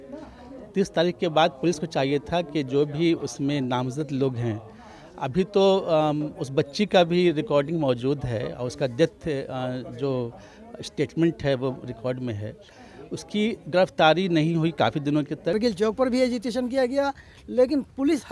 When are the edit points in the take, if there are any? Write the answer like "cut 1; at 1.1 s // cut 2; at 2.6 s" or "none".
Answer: cut 1; at 15.5 s